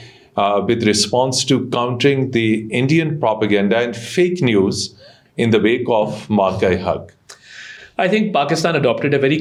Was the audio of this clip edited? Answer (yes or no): no